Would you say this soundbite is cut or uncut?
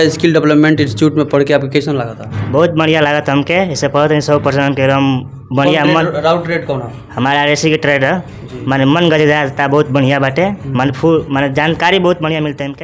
uncut